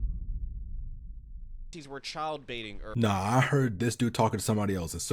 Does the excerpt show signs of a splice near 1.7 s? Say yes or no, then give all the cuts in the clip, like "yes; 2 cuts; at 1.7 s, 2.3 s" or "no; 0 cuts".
yes; 1 cut; at 1.7 s